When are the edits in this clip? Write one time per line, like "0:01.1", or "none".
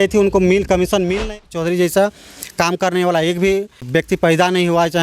0:01.2
0:04.1